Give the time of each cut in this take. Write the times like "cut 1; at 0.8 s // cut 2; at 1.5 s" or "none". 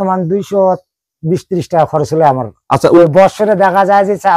cut 1; at 3.0 s